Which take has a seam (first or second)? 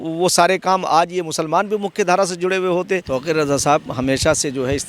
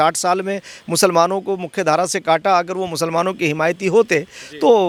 first